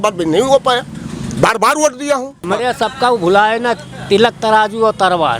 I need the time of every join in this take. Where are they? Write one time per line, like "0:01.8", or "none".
0:02.5